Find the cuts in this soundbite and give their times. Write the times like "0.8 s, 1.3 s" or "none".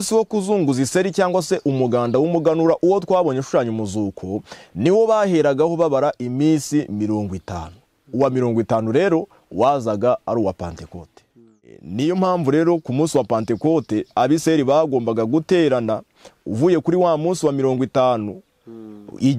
11.8 s